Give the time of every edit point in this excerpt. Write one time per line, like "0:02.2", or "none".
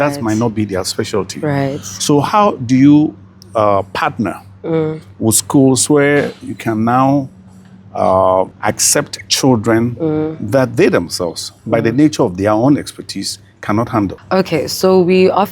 0:14.2